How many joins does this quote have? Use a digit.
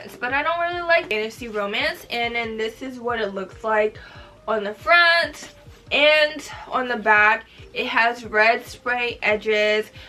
1